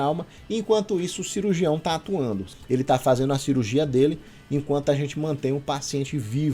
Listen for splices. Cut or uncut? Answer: cut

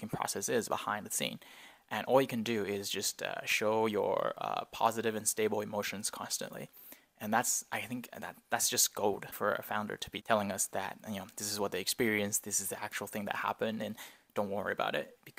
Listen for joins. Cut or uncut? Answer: cut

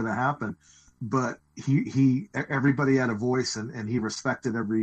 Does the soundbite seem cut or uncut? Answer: uncut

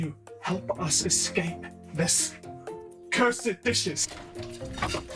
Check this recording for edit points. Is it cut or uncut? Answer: uncut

